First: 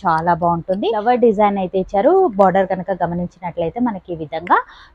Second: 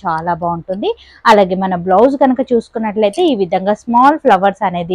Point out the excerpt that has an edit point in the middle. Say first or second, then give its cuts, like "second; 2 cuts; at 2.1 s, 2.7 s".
first; 1 cut; at 1.0 s